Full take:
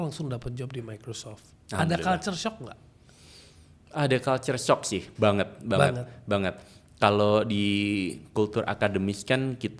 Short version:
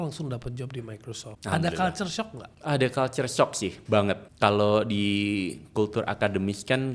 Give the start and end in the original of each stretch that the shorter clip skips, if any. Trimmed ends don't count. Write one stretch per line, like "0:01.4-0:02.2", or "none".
0:01.3-0:01.6
0:02.7-0:03.8
0:05.6-0:06.9